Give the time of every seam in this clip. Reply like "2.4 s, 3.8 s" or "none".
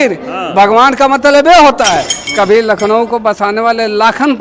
2.2 s